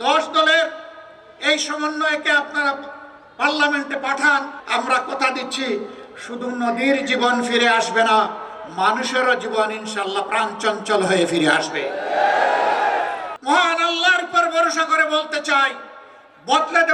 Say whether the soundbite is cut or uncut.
cut